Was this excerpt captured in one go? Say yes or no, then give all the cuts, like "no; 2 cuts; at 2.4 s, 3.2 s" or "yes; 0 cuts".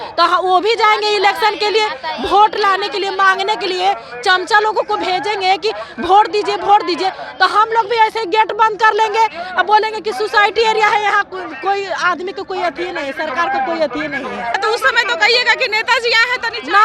no; 1 cut; at 14.6 s